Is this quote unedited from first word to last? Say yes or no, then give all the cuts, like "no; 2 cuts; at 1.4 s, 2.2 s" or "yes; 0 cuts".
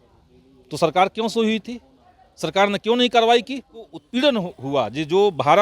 no; 1 cut; at 4.0 s